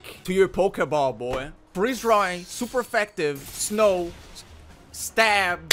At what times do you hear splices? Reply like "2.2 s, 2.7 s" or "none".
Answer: none